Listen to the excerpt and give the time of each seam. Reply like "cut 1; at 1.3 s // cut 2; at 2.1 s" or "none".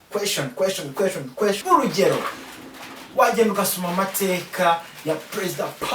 cut 1; at 1.6 s